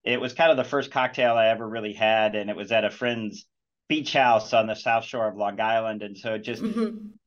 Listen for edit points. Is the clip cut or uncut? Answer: uncut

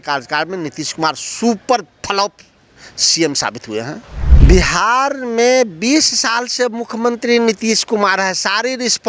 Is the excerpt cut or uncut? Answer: cut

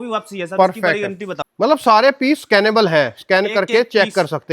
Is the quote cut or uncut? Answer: cut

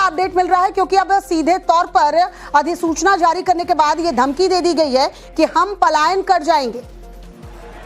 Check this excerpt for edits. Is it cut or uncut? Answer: cut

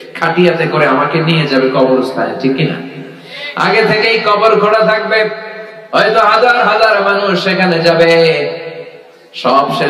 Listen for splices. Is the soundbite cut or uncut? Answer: uncut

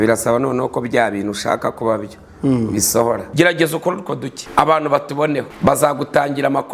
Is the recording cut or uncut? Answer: cut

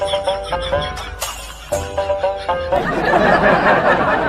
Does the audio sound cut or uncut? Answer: uncut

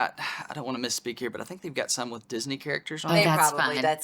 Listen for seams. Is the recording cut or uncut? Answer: uncut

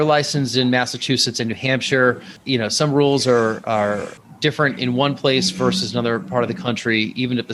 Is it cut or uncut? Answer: uncut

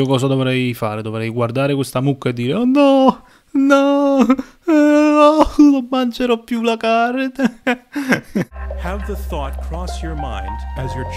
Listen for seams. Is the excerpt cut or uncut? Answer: cut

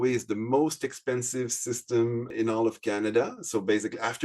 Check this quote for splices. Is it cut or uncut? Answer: cut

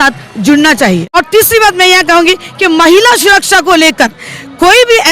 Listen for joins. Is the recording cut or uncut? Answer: cut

